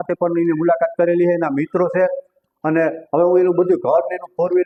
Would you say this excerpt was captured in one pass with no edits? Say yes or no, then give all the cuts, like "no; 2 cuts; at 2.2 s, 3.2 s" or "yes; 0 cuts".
yes; 0 cuts